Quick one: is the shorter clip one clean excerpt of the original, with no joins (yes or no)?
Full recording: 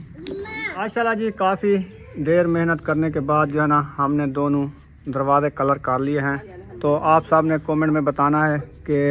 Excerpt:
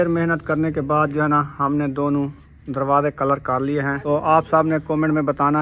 no